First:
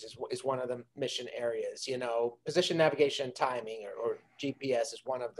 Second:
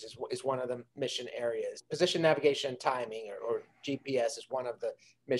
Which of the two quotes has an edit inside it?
second; 1 cut; at 1.8 s

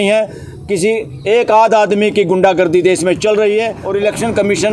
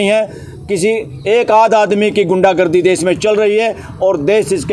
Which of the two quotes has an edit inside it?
first; 1 cut; at 3.8 s

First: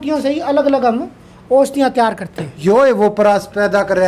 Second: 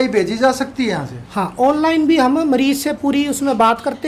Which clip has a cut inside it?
first; 1 cut; at 2.6 s

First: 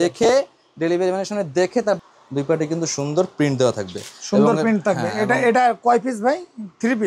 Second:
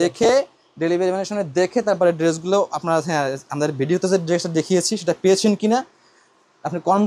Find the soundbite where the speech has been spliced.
first; 1 cut; at 2.0 s

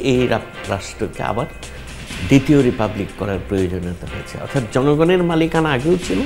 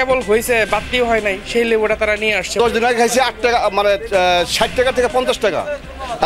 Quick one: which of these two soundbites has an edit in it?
second; 1 cut; at 2.5 s

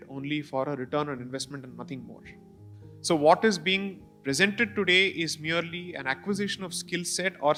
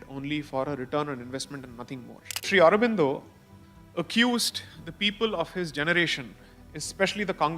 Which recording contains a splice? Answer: second; 1 cut; at 2.5 s

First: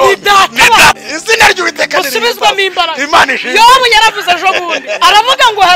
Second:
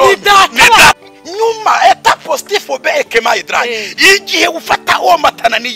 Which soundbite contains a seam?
second; 1 cut; at 1.1 s

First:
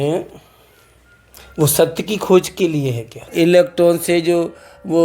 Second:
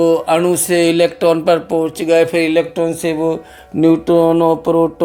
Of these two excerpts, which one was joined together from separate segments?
first; 1 cut; at 3.3 s

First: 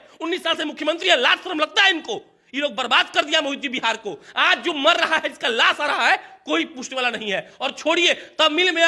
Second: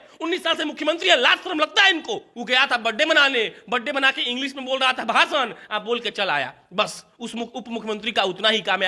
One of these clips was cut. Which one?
second; 1 cut; at 2.3 s

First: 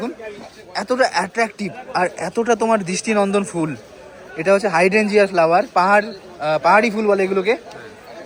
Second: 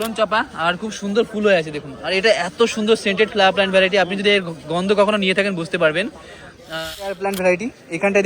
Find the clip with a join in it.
second; 1 cut; at 7.1 s

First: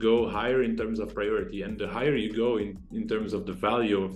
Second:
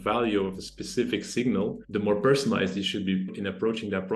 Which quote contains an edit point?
second; 2 cuts; at 1.8 s, 3.4 s

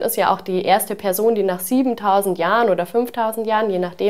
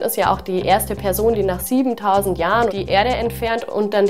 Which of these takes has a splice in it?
second; 1 cut; at 2.7 s

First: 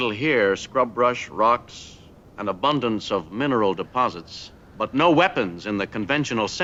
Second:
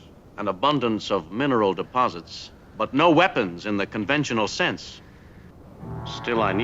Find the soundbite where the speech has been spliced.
second; 1 cut; at 5.6 s

